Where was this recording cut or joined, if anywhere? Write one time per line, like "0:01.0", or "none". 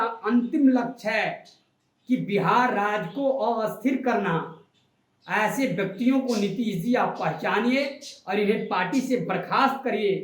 none